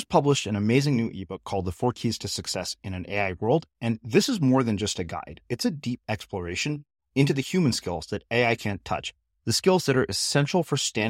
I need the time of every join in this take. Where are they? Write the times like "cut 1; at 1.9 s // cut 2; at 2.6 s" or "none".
none